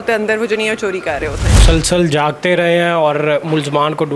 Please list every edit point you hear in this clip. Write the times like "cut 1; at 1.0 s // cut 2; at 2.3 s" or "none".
cut 1; at 1.6 s